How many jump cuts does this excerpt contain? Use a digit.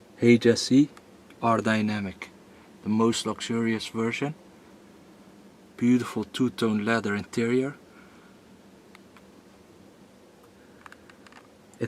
0